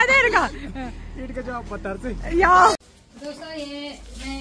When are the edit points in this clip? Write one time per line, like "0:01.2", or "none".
0:02.8